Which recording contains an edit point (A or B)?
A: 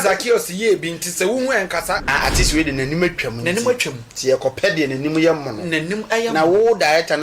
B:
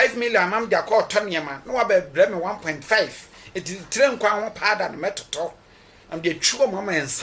A